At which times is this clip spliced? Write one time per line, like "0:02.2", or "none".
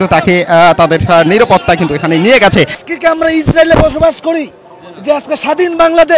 0:02.8